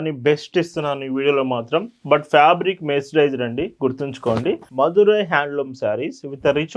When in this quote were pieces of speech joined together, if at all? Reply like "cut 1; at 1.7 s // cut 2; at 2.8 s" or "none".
cut 1; at 4.6 s